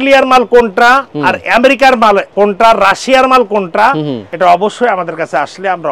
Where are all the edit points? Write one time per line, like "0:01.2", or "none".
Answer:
0:02.3
0:04.2